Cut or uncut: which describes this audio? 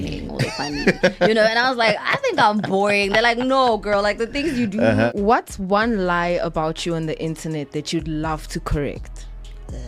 cut